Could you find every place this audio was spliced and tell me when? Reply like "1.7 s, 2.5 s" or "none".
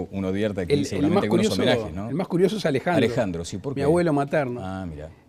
none